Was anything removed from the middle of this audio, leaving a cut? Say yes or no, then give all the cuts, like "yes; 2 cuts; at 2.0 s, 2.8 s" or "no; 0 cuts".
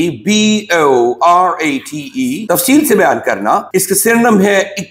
yes; 2 cuts; at 2.4 s, 3.6 s